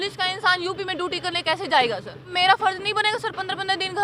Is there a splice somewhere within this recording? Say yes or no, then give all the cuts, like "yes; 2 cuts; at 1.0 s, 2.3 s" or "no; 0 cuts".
yes; 1 cut; at 2.3 s